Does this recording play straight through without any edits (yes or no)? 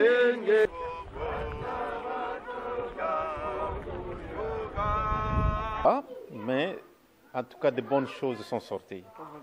no